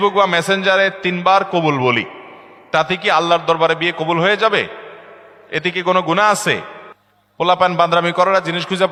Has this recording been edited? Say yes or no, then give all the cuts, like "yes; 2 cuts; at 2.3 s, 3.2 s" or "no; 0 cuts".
no; 0 cuts